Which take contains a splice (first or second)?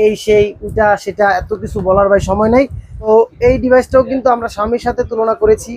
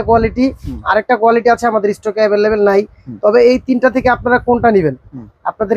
first